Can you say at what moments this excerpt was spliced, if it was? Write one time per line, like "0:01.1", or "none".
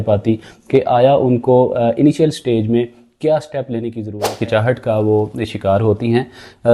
0:04.3